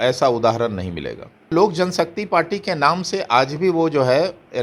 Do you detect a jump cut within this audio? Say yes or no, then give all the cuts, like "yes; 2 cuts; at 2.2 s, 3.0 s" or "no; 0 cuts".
yes; 1 cut; at 1.5 s